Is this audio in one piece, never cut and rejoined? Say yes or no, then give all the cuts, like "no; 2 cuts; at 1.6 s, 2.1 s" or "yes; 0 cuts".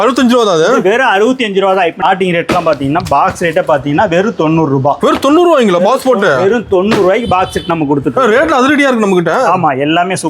no; 1 cut; at 2.0 s